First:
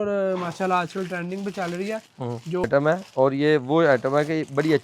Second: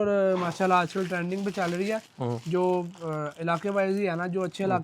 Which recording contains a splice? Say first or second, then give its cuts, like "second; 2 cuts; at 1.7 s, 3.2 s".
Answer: first; 1 cut; at 2.7 s